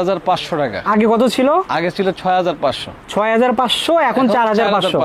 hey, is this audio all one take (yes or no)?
yes